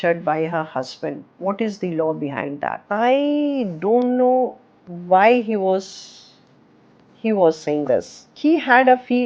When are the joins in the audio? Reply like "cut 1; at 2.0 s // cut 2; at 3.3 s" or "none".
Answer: cut 1; at 1.3 s // cut 2; at 2.8 s // cut 3; at 8.2 s